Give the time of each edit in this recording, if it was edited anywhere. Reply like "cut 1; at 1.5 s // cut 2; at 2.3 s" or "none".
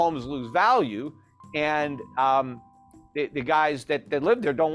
none